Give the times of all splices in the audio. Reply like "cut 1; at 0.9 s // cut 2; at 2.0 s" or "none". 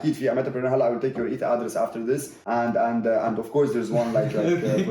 cut 1; at 2.3 s